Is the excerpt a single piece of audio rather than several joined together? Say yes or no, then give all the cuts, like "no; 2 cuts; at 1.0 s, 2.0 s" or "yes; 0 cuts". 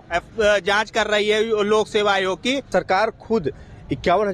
no; 1 cut; at 2.7 s